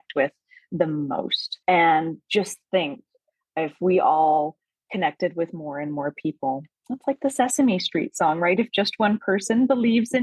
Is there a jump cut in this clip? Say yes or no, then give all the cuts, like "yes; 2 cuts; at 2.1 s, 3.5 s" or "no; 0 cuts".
yes; 1 cut; at 1.4 s